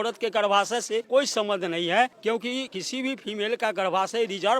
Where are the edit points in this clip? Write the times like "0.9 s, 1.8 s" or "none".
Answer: 1.0 s, 2.5 s